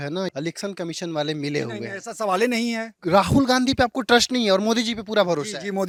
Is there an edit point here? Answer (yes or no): no